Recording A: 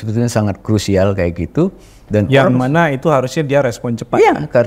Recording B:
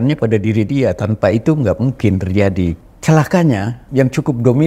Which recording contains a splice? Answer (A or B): B